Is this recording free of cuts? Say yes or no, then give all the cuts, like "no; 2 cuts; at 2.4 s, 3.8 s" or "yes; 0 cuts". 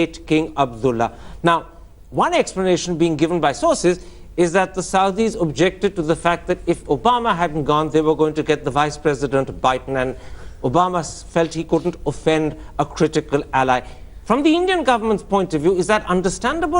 no; 1 cut; at 8.6 s